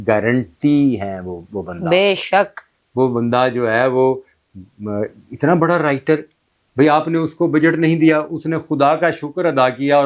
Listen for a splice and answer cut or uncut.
uncut